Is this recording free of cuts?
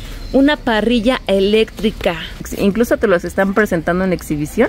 no; 1 cut; at 2.5 s

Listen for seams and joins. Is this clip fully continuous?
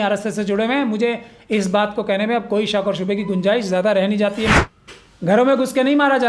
no; 1 cut; at 4.5 s

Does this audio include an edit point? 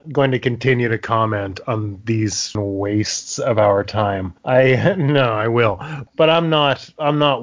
yes; 2 cuts; at 2.6 s, 6.0 s

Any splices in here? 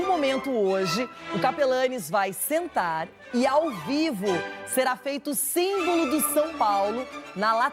no; 0 cuts

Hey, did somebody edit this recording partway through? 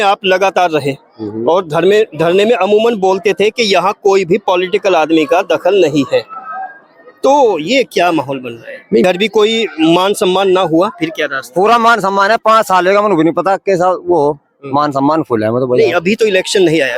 yes; 1 cut; at 9.0 s

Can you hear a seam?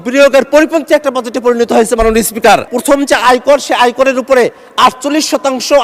yes; 1 cut; at 2.7 s

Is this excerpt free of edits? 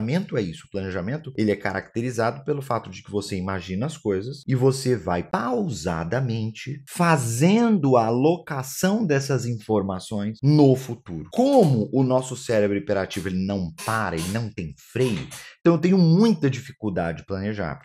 yes; 0 cuts

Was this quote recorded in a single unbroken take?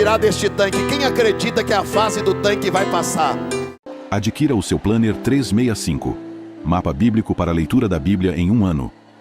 no; 1 cut; at 3.7 s

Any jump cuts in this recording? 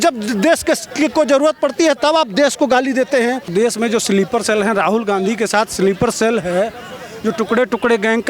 yes; 1 cut; at 3.5 s

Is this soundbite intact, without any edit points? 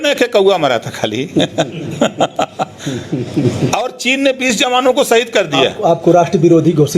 yes; 0 cuts

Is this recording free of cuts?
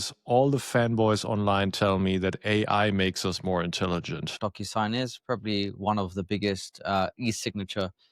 no; 1 cut; at 4.4 s

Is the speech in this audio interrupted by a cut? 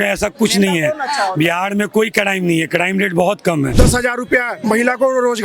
yes; 1 cut; at 3.7 s

